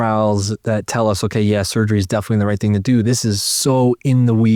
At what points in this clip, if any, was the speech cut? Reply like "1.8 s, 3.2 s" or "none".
none